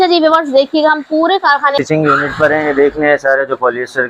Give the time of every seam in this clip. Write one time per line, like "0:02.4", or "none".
0:01.4